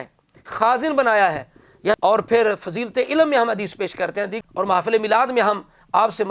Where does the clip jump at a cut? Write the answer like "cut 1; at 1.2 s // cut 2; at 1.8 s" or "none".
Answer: cut 1; at 2.0 s // cut 2; at 4.3 s

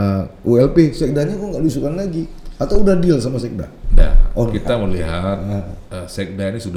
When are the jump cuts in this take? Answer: none

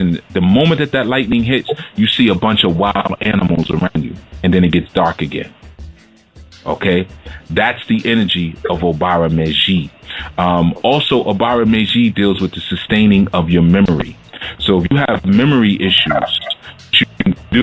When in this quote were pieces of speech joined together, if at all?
none

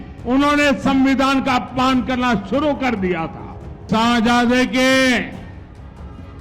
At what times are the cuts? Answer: cut 1; at 3.8 s

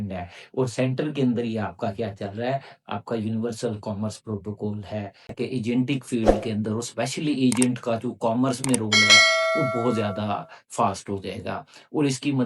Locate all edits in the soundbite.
cut 1; at 5.3 s

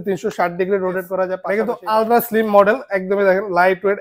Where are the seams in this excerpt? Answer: cut 1; at 1.4 s

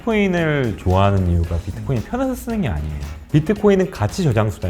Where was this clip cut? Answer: cut 1; at 3.1 s

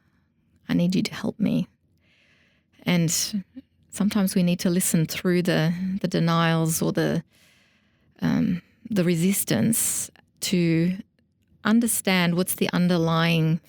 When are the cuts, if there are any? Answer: none

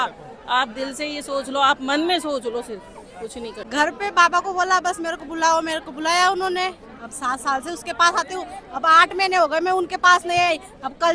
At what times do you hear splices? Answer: cut 1; at 3.6 s

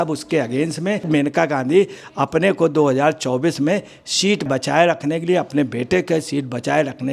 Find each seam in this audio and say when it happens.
cut 1; at 1.1 s // cut 2; at 4.5 s

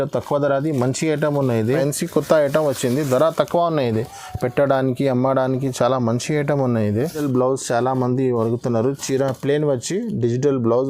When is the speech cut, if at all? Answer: cut 1; at 1.7 s // cut 2; at 7.2 s

